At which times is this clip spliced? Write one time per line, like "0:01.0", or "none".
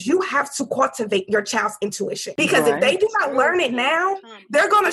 0:02.2